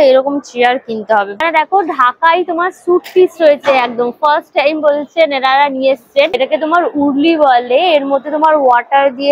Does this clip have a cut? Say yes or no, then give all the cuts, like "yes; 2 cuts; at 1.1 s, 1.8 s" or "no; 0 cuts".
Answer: yes; 2 cuts; at 1.4 s, 6.4 s